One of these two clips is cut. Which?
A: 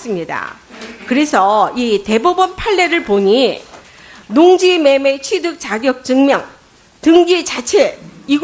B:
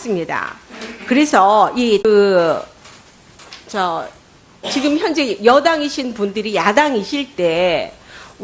A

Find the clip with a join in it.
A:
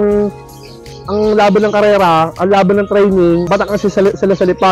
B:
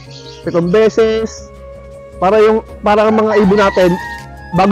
A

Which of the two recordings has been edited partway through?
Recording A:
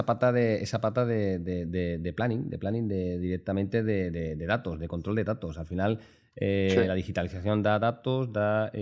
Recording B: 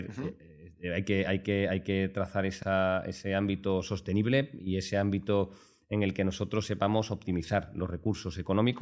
B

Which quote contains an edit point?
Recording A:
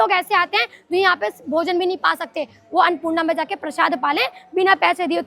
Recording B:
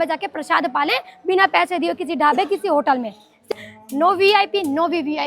B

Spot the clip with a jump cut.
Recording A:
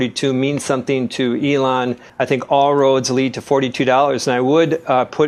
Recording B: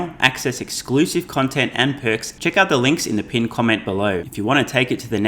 B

